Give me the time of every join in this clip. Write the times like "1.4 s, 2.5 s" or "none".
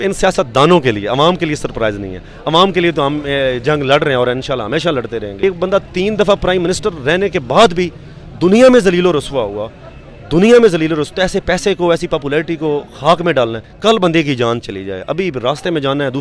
5.3 s, 13.6 s